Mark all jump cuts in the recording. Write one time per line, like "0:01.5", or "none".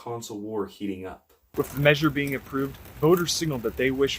0:01.5

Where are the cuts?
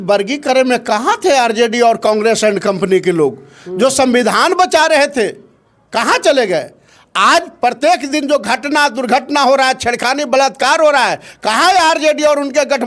none

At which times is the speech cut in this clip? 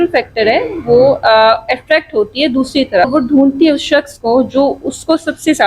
0:03.1

